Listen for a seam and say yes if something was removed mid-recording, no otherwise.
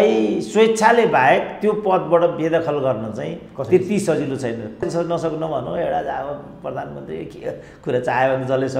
yes